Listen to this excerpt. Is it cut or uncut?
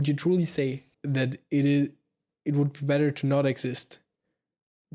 cut